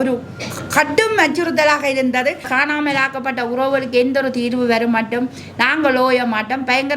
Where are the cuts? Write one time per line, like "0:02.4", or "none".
0:02.5